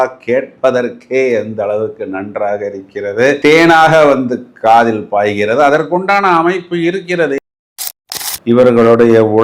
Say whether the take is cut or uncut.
cut